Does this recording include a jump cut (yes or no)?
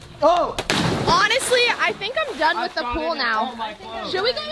no